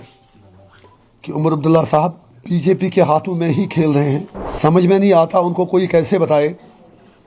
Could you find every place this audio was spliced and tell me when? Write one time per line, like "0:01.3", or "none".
0:02.3
0:04.4